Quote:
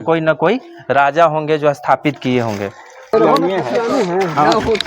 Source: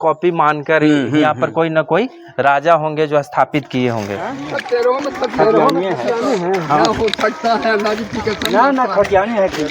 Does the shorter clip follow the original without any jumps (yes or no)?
no